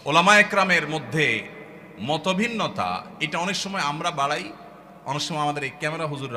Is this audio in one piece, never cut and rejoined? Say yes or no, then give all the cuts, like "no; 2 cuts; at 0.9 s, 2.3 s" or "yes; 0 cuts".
yes; 0 cuts